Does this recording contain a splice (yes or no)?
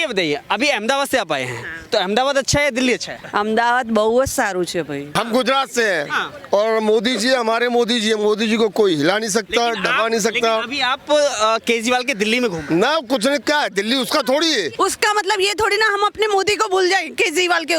yes